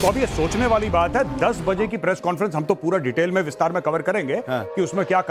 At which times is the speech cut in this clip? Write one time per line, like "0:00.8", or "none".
0:03.3